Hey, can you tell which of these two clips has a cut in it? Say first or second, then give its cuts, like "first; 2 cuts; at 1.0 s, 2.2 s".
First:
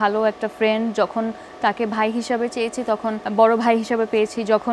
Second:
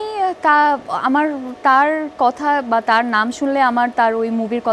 first; 1 cut; at 3.2 s